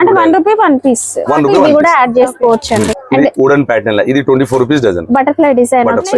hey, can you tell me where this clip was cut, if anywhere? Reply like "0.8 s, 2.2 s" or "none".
1.5 s